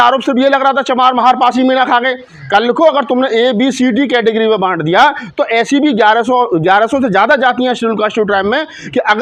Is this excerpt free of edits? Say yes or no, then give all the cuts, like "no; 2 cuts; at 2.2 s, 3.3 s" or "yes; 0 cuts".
yes; 0 cuts